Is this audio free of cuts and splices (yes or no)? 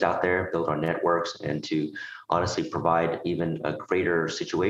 yes